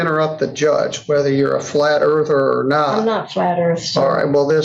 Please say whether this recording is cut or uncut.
uncut